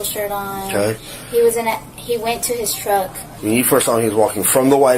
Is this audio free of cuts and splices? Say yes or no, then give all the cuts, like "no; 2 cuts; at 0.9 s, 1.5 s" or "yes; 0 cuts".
no; 1 cut; at 3.2 s